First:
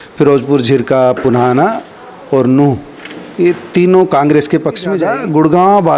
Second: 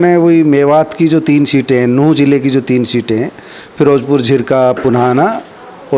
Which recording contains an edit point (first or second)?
first